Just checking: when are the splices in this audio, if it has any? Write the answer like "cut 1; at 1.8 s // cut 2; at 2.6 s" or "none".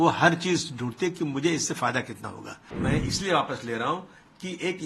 cut 1; at 2.6 s